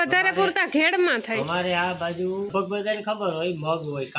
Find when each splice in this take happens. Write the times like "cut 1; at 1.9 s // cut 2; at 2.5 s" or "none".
cut 1; at 2.6 s